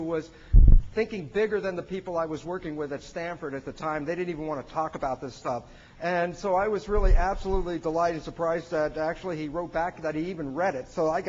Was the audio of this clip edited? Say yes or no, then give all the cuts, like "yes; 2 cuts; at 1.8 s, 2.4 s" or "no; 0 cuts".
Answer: yes; 1 cut; at 5.0 s